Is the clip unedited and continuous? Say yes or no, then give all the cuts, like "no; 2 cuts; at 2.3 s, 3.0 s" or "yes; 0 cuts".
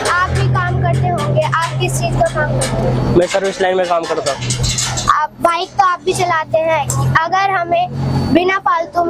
yes; 0 cuts